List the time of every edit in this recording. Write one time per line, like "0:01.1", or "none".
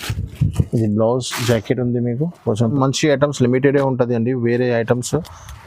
0:02.7